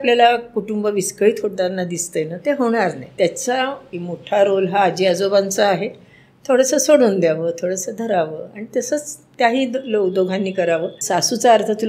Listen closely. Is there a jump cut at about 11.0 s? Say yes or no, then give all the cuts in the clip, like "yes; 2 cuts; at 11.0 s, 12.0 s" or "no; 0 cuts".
yes; 3 cuts; at 3.1 s, 3.9 s, 11.0 s